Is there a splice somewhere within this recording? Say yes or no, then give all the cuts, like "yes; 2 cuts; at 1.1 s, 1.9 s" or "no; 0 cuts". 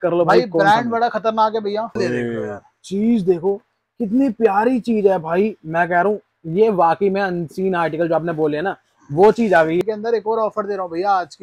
yes; 2 cuts; at 2.0 s, 9.8 s